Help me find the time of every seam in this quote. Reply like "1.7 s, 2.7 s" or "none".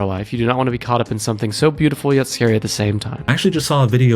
3.1 s